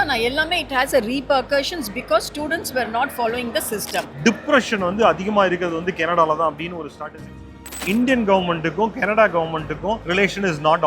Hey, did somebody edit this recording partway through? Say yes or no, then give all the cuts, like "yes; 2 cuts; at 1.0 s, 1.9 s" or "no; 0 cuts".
yes; 2 cuts; at 4.1 s, 7.8 s